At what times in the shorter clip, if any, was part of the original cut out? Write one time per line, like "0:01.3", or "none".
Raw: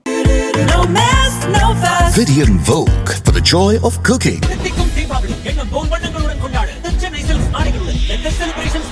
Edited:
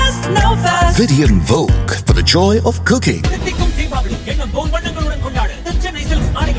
none